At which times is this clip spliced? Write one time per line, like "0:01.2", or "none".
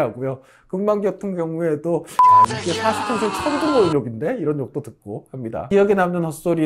0:05.7